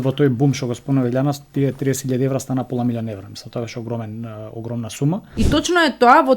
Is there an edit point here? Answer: yes; 1 cut; at 5.3 s

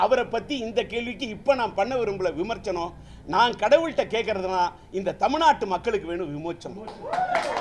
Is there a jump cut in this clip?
no; 0 cuts

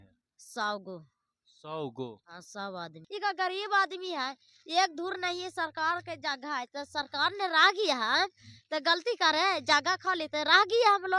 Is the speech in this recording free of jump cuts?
no; 1 cut; at 3.0 s

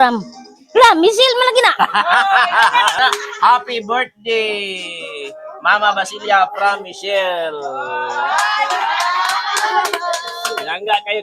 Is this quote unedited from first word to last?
no; 1 cut; at 3.0 s

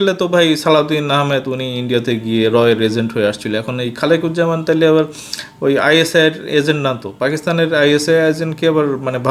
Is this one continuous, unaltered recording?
yes; 0 cuts

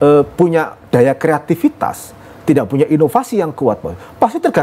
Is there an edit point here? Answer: no; 0 cuts

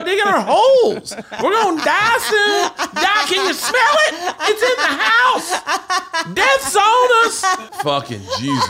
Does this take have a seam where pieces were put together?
yes; 1 cut; at 7.7 s

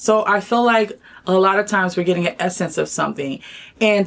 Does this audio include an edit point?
no; 0 cuts

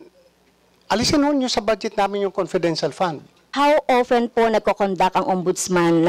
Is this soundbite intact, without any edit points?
no; 1 cut; at 3.5 s

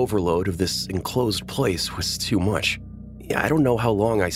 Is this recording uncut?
yes; 0 cuts

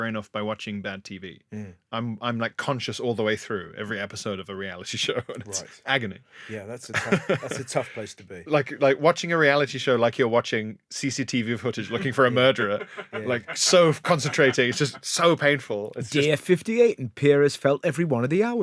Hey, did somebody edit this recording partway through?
no; 0 cuts

